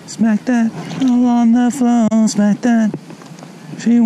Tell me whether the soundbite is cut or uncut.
uncut